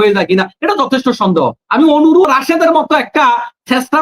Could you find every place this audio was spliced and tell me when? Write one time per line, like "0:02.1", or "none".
0:02.2